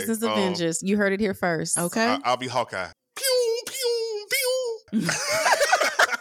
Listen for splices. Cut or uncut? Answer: cut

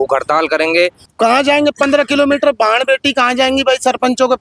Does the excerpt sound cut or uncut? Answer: cut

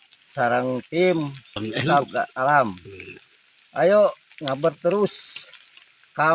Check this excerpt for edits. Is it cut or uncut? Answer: uncut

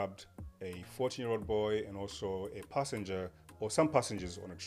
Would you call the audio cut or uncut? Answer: uncut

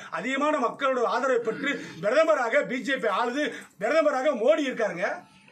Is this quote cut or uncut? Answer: uncut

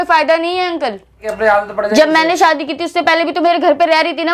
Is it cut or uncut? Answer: cut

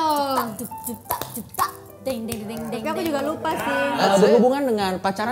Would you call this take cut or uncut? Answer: cut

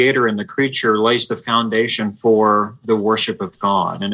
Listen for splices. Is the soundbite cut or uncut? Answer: uncut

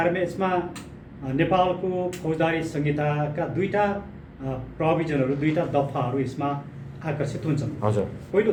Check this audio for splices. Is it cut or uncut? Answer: uncut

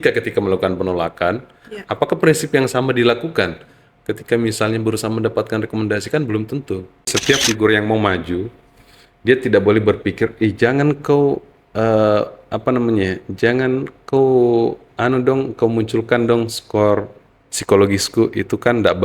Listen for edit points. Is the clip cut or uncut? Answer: cut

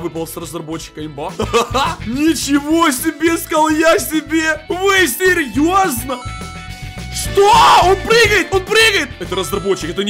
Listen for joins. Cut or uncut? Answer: cut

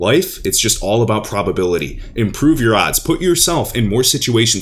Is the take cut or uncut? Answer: uncut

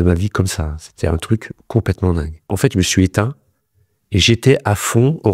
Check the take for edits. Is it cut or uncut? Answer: cut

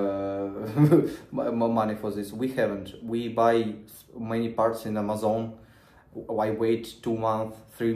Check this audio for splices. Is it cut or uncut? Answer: uncut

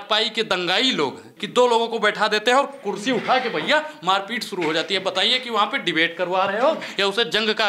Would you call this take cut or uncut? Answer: cut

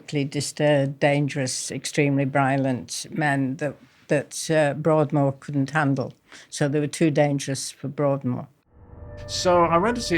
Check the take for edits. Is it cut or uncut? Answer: cut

